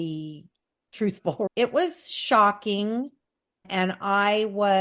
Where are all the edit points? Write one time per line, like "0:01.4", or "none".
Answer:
0:01.5